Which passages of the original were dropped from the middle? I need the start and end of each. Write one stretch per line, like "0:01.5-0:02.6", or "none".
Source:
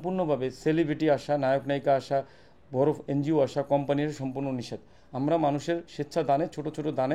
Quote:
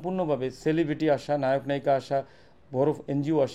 none